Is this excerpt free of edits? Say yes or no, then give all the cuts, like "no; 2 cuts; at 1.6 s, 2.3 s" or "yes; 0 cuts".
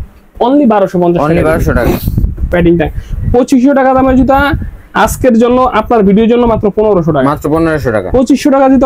no; 1 cut; at 2.5 s